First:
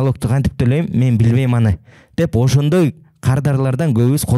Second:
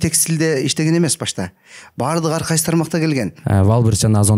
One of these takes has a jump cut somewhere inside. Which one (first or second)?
second